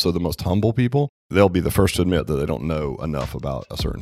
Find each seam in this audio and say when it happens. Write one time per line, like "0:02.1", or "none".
0:01.2